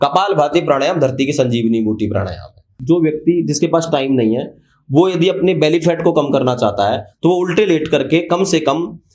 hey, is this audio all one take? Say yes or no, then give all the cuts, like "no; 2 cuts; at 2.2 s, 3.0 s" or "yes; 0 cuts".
no; 1 cut; at 2.7 s